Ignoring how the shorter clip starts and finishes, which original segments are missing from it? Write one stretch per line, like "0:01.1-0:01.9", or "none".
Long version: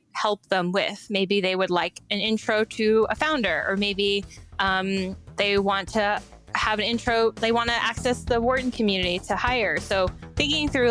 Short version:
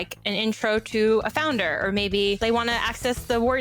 0:04.2-0:07.4